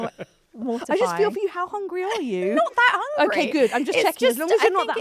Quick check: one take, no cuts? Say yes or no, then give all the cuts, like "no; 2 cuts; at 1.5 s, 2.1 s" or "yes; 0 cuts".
yes; 0 cuts